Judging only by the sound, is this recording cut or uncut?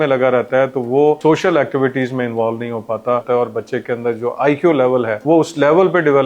cut